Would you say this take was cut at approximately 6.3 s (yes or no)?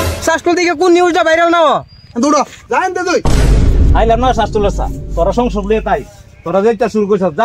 no